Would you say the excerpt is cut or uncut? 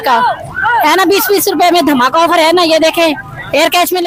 uncut